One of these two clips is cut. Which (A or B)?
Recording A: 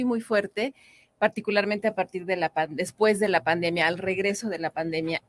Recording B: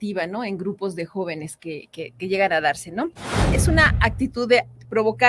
B